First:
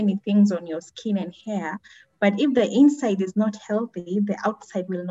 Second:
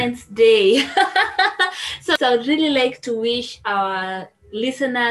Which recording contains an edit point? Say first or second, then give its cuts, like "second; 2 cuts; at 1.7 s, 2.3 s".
second; 1 cut; at 2.0 s